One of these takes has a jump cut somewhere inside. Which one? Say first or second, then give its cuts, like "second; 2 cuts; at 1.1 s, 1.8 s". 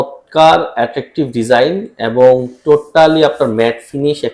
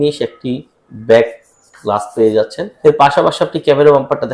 second; 1 cut; at 2.6 s